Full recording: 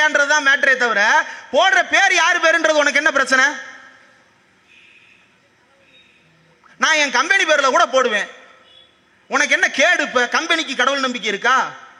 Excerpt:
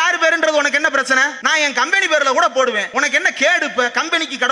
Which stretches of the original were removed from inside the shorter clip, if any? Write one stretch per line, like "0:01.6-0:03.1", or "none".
0:03.6-0:06.7
0:08.2-0:09.2